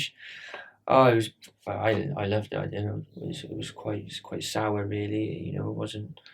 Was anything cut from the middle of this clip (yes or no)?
yes